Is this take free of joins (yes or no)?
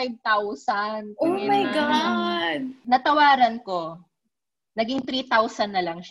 yes